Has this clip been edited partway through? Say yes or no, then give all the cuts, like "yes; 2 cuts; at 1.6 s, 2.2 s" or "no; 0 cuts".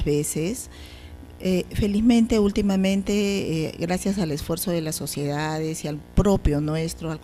no; 0 cuts